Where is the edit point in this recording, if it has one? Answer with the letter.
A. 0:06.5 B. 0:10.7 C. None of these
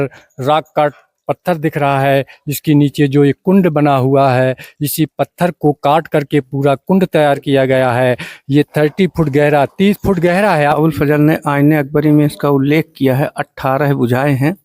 B